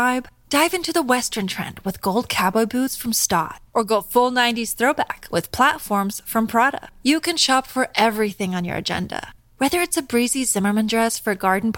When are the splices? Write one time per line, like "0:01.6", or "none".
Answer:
none